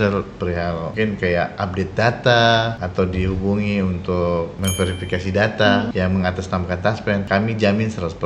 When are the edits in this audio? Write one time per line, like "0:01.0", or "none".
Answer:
0:00.9
0:02.8
0:04.5
0:05.9
0:07.2